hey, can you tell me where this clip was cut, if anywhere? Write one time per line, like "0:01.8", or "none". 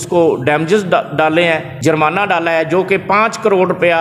0:01.7

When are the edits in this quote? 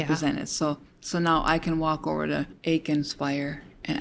0:02.5

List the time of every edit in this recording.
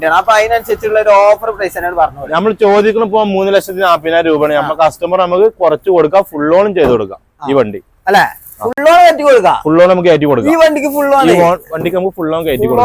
none

